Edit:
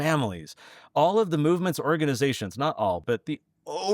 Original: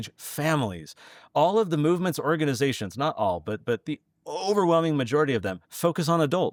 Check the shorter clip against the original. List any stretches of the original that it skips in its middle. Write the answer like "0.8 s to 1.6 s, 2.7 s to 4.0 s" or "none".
3.4 s to 3.6 s